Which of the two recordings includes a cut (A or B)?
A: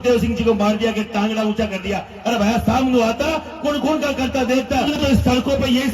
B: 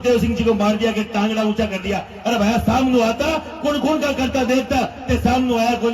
A